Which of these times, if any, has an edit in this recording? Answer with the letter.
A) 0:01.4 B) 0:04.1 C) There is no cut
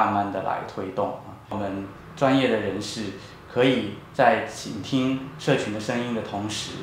A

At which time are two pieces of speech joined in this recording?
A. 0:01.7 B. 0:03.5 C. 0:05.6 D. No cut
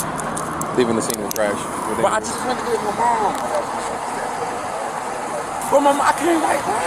D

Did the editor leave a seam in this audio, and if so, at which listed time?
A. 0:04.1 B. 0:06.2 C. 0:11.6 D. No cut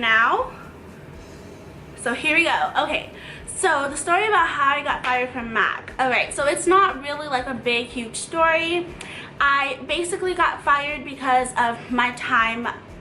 B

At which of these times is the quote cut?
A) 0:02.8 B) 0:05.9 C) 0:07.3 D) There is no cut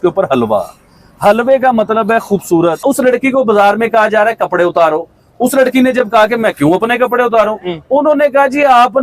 A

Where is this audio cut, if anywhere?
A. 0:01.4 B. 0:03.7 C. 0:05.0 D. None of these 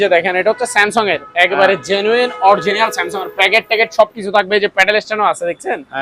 D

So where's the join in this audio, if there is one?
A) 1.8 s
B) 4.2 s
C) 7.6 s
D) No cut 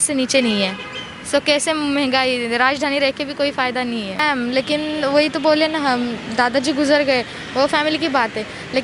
B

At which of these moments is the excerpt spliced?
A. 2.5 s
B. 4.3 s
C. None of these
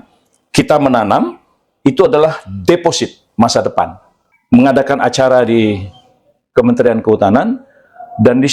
B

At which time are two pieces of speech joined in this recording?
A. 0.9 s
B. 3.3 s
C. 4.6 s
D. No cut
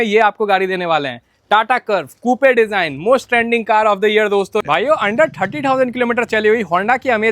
C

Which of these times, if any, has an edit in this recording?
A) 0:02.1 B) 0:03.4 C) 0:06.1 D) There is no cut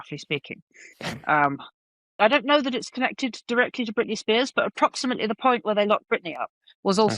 A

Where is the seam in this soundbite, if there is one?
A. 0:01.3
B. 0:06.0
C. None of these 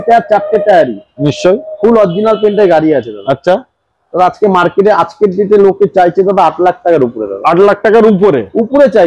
C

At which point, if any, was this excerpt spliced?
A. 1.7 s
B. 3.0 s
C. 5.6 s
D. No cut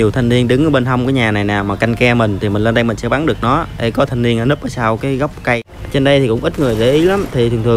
C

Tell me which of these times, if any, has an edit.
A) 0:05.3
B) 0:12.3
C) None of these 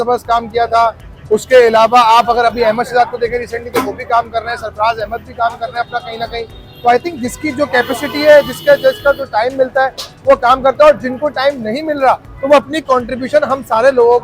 C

